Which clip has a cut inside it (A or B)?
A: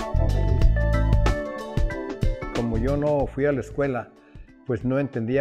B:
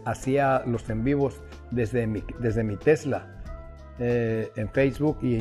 A